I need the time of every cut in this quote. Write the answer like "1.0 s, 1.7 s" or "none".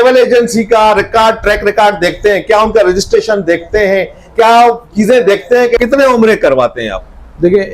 5.8 s